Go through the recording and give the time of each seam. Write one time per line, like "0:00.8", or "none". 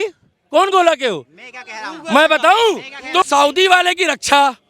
0:03.3